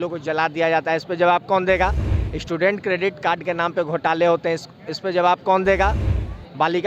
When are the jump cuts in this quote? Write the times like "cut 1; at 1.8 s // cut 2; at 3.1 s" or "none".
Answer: none